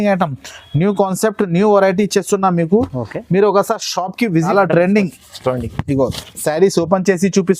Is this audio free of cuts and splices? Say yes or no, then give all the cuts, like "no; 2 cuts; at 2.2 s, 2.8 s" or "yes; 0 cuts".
no; 1 cut; at 4.5 s